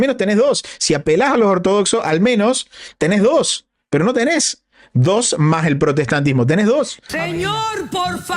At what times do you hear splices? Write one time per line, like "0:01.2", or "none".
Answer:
0:07.0